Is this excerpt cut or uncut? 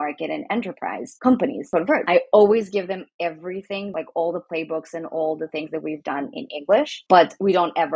cut